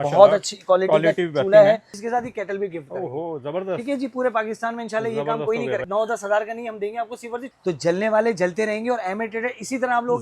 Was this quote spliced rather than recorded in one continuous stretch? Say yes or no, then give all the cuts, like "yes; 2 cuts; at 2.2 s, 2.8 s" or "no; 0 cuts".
yes; 3 cuts; at 1.9 s, 5.8 s, 7.5 s